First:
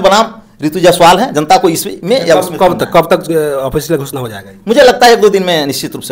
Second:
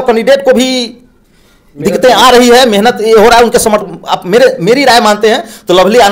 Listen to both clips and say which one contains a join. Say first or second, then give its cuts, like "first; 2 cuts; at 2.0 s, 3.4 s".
second; 1 cut; at 3.8 s